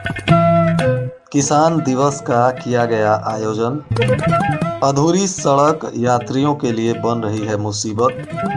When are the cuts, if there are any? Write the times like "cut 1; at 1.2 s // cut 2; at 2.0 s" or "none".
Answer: cut 1; at 1.2 s